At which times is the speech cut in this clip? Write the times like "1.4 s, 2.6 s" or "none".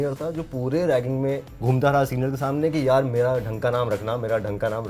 1.5 s